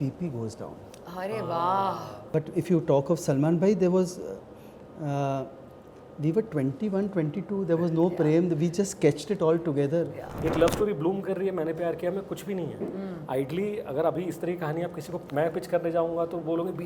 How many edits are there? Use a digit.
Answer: 2